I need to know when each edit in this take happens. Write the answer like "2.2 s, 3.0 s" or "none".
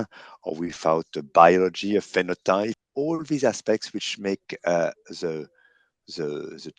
2.8 s